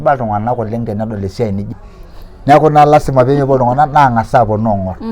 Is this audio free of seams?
no; 1 cut; at 1.7 s

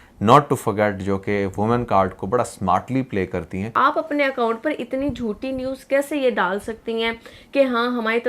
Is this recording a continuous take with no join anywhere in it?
no; 1 cut; at 3.7 s

